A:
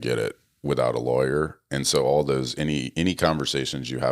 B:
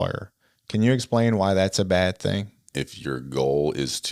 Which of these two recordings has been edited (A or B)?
B